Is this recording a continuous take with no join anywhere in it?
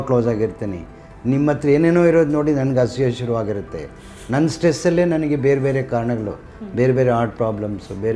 yes; 0 cuts

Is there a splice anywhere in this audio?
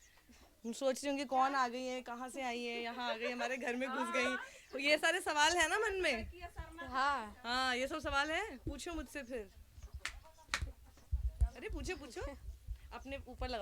no; 0 cuts

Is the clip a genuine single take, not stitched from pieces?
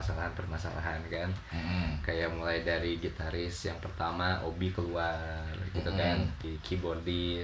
no; 1 cut; at 6.5 s

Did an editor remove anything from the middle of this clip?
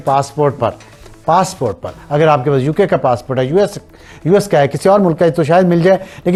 no; 0 cuts

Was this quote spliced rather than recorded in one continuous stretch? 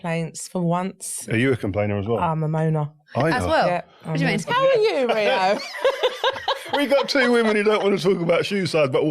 yes; 2 cuts; at 1.3 s, 4.5 s

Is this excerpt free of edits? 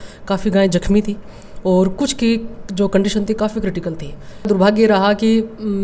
no; 1 cut; at 4.5 s

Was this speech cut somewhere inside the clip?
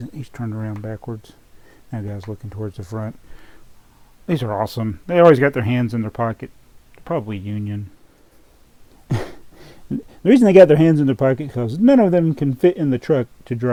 no; 0 cuts

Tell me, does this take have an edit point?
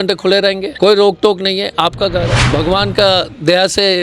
yes; 1 cut; at 2.4 s

